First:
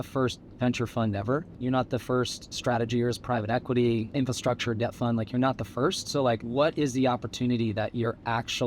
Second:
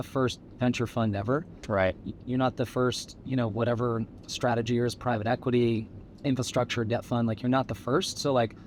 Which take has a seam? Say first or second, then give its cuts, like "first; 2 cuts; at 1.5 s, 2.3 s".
first; 4 cuts; at 1.5 s, 2.4 s, 4.1 s, 6.4 s